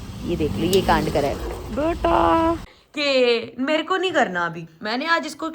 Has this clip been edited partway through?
yes; 1 cut; at 2.7 s

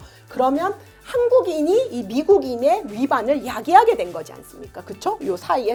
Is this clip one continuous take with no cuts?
yes; 0 cuts

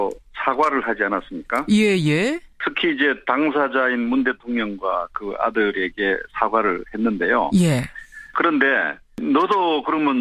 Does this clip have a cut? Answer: no; 0 cuts

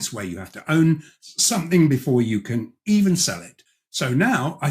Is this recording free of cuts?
yes; 0 cuts

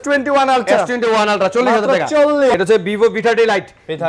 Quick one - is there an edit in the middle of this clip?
yes; 1 cut; at 2.5 s

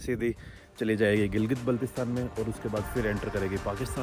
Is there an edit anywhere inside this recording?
no; 0 cuts

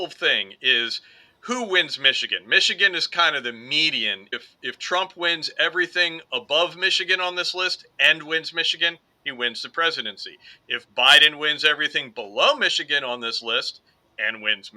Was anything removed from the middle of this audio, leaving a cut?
yes; 1 cut; at 4.3 s

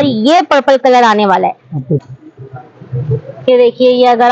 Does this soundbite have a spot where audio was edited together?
yes; 1 cut; at 2.0 s

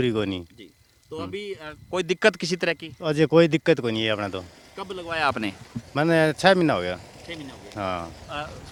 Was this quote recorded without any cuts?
yes; 0 cuts

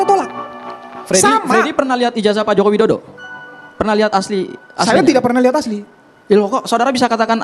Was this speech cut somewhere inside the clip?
no; 0 cuts

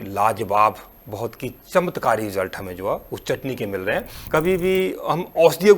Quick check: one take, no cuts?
no; 1 cut; at 4.2 s

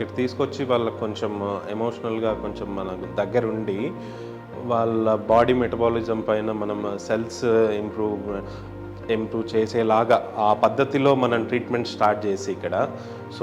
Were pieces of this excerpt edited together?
no; 0 cuts

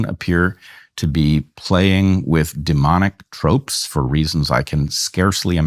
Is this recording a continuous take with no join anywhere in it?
yes; 0 cuts

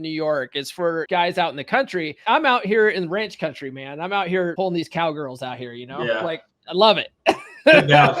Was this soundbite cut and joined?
yes; 3 cuts; at 1.1 s, 2.2 s, 4.5 s

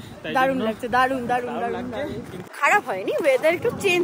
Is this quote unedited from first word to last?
no; 1 cut; at 2.4 s

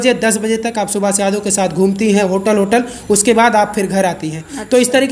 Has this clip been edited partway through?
no; 0 cuts

